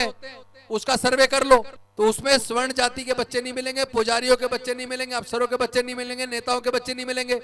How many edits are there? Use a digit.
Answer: 1